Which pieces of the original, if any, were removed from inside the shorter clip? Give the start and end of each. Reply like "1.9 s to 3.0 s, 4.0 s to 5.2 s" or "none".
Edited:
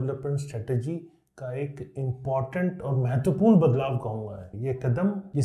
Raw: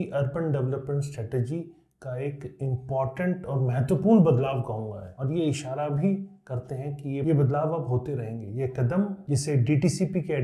5.1 s to 8.4 s